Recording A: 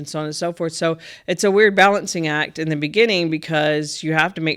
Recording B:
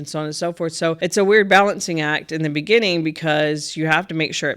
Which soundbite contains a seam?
B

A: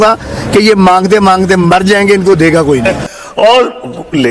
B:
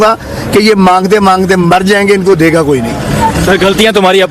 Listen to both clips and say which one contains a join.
A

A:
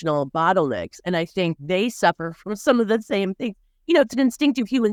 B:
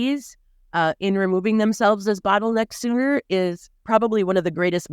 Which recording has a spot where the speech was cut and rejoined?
B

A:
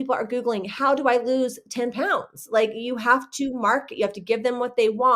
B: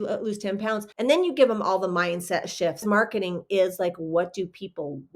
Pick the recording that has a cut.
B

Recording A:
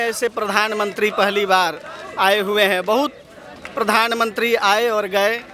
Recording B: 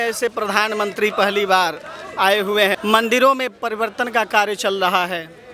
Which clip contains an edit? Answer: B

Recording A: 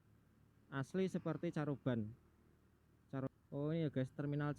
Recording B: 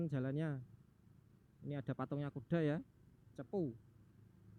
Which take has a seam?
A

